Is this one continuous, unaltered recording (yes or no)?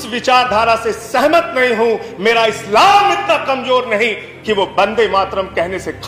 yes